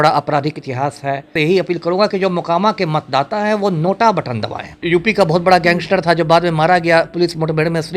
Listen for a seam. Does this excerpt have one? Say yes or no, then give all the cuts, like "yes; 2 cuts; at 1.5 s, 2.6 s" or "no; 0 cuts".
yes; 2 cuts; at 1.3 s, 4.8 s